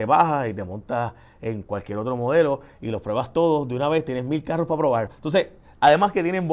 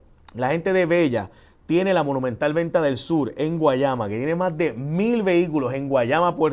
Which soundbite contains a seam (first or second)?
first